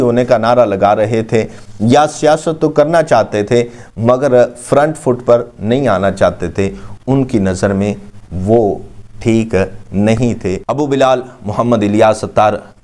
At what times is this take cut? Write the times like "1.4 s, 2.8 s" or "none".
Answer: 10.6 s